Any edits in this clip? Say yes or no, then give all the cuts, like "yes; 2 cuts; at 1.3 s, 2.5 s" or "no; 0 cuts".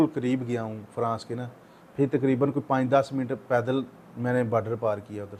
no; 0 cuts